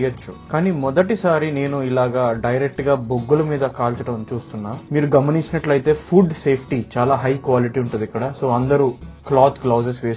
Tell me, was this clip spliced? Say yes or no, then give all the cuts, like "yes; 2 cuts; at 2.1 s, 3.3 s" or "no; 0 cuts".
no; 0 cuts